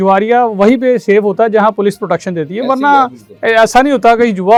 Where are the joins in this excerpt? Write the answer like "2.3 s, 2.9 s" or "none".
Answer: none